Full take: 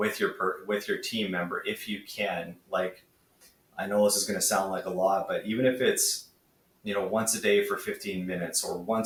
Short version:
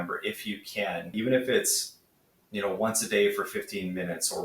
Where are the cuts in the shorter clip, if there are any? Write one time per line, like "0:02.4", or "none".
0:01.1